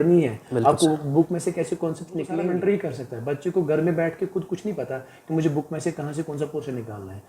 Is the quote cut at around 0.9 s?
no; 1 cut; at 2.3 s

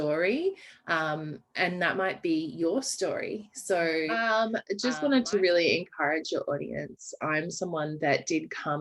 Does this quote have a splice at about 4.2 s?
yes; 1 cut; at 4.2 s

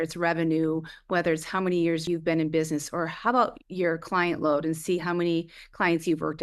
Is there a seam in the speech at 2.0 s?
yes; 1 cut; at 2.0 s

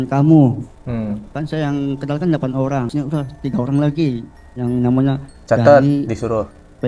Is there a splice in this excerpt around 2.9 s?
yes; 1 cut; at 2.9 s

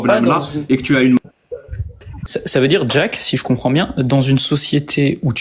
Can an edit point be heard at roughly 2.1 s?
yes; 1 cut; at 2.1 s

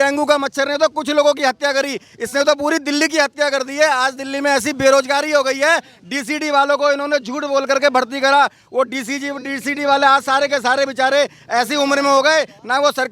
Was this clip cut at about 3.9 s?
no; 0 cuts

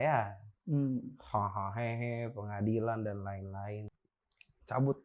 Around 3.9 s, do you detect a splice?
yes; 1 cut; at 3.9 s

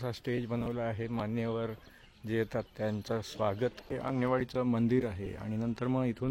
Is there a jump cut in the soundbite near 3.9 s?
yes; 1 cut; at 3.9 s

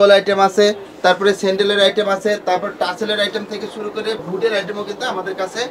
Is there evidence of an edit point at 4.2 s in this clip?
yes; 1 cut; at 4.2 s

